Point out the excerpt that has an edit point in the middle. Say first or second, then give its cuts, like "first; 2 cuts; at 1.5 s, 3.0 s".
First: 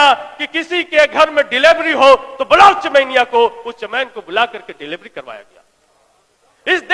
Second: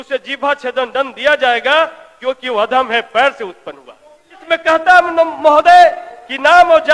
second; 1 cut; at 4.4 s